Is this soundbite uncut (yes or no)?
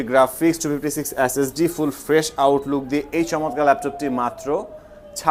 yes